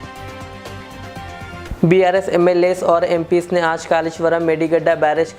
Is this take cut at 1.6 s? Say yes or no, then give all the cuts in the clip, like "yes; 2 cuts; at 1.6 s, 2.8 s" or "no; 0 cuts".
yes; 1 cut; at 1.6 s